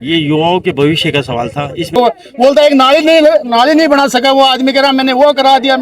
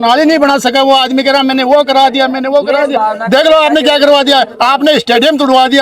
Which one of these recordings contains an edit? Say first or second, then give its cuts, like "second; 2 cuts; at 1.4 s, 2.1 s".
first; 1 cut; at 1.9 s